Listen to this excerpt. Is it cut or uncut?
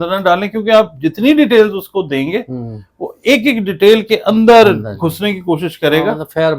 uncut